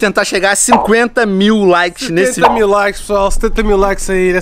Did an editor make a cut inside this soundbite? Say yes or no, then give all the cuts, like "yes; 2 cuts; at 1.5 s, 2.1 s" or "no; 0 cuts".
no; 0 cuts